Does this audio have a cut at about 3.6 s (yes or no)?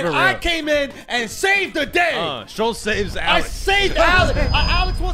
no